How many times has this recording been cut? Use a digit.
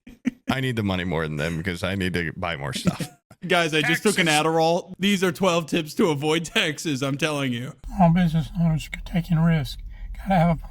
3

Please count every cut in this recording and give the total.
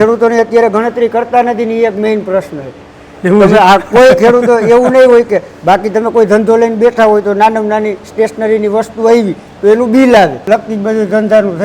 1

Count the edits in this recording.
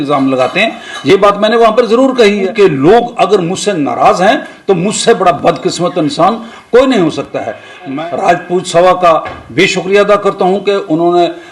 2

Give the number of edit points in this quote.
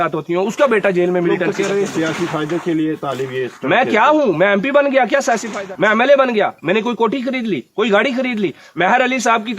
1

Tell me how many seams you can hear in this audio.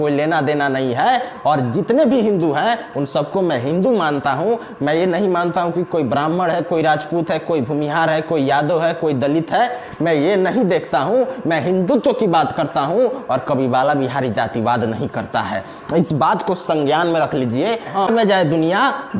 1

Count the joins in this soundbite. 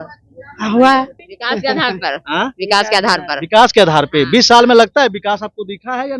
1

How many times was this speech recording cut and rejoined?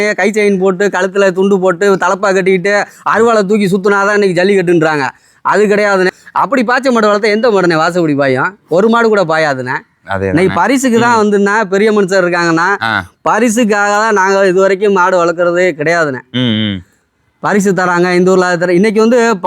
1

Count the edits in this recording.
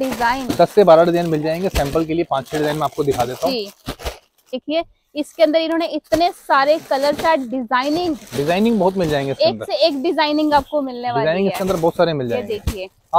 1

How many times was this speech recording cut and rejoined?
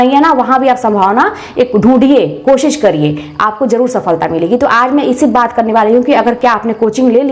0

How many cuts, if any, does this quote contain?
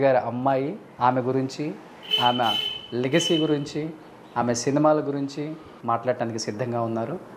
2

